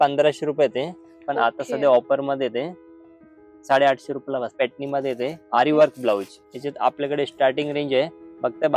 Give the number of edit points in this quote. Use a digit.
2